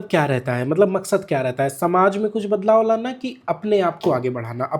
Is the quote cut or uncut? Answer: uncut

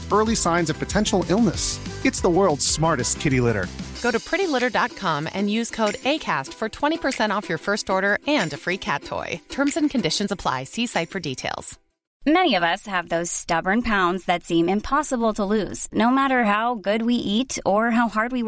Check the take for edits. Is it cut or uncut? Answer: cut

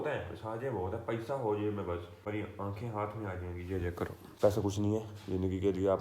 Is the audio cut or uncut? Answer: cut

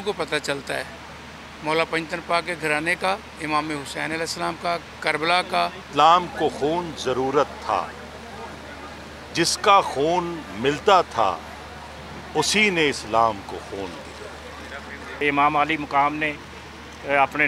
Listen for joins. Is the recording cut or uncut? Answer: cut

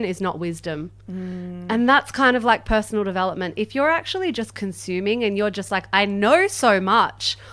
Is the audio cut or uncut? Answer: uncut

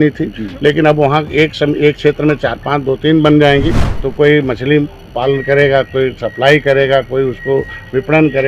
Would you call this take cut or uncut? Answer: cut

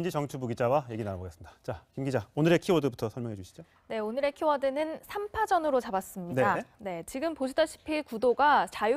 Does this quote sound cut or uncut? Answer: cut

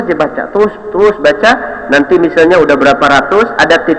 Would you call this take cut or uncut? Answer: uncut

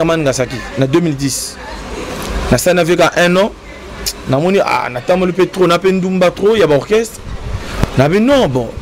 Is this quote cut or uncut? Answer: uncut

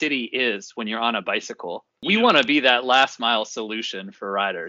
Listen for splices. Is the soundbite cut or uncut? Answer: cut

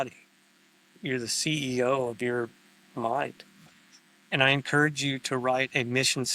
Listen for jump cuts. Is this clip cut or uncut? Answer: uncut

